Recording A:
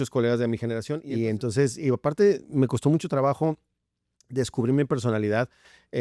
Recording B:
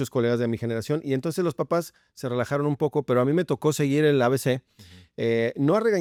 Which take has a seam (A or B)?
A